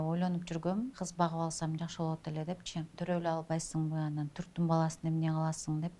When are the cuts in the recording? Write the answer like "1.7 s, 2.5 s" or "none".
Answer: 1.0 s, 2.9 s

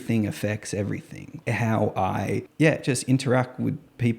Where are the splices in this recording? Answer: 1.3 s, 2.5 s

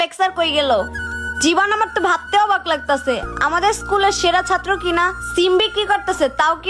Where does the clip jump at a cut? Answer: none

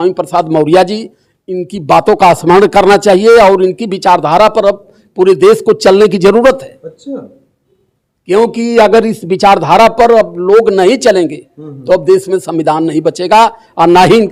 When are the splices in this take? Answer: none

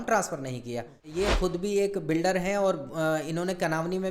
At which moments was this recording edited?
1.4 s

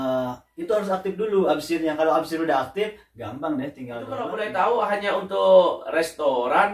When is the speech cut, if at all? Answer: 4.3 s

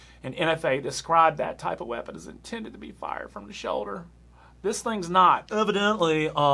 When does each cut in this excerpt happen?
5.5 s

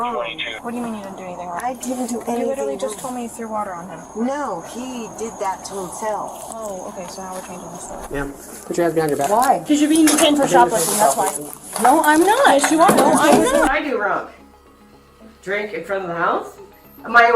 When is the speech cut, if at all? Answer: 8.0 s, 13.7 s

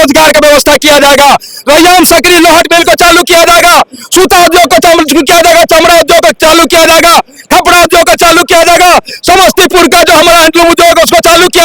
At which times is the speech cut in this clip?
none

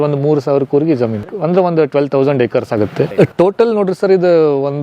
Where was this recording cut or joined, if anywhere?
1.3 s, 3.1 s

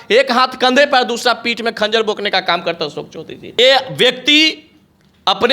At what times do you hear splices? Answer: 3.6 s

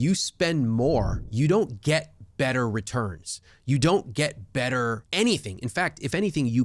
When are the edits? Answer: 1.2 s, 5.0 s

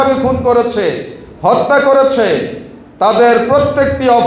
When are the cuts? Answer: none

